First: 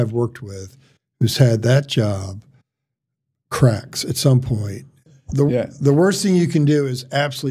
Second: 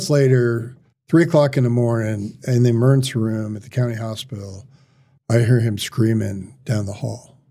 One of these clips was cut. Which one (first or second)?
first